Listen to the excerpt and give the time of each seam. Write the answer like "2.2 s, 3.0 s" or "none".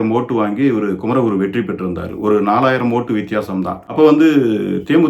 3.8 s